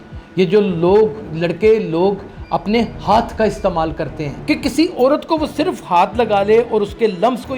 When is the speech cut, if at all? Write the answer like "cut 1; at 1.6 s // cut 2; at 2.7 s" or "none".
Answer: cut 1; at 4.3 s